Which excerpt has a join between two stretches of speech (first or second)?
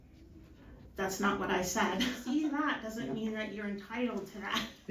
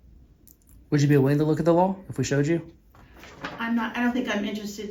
first